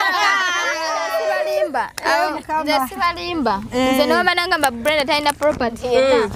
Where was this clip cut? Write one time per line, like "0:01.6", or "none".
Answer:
0:00.9